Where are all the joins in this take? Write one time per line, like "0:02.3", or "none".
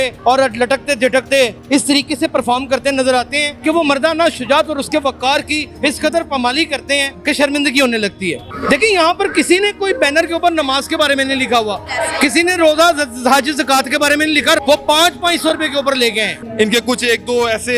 0:08.4
0:14.6
0:16.4